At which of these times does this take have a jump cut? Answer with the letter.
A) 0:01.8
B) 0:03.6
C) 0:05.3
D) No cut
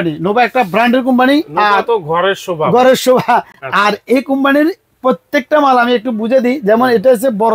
D